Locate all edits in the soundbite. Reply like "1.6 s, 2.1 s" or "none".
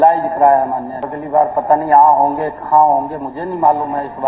1.2 s